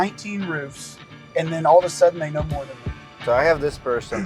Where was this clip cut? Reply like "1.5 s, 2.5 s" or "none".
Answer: 3.2 s